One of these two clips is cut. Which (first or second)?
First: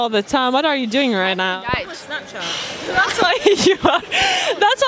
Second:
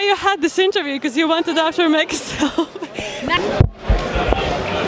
second